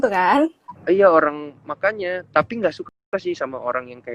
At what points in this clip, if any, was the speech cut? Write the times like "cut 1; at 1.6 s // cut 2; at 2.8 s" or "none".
none